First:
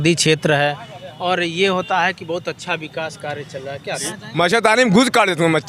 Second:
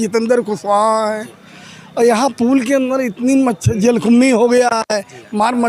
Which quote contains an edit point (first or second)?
first